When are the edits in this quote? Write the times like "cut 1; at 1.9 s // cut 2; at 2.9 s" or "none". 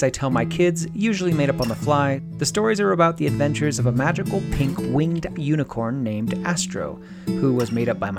cut 1; at 2.3 s